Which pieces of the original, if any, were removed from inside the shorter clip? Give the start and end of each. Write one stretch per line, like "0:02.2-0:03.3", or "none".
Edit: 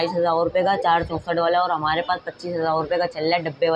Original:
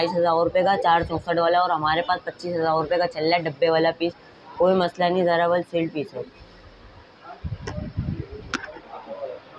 none